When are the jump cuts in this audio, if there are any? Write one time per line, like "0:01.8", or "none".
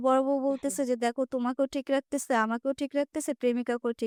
none